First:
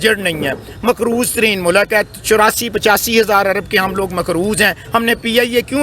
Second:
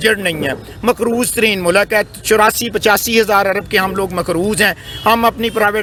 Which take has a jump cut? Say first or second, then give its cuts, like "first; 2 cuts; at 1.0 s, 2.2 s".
first; 1 cut; at 4.8 s